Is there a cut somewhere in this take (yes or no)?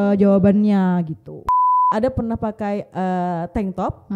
yes